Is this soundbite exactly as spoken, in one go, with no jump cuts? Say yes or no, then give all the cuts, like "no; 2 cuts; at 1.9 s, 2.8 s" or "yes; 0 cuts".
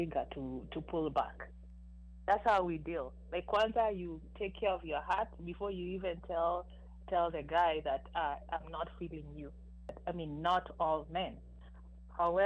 no; 1 cut; at 10.0 s